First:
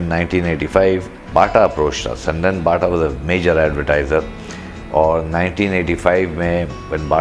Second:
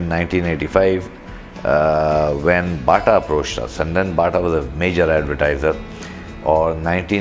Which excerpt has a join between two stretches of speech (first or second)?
first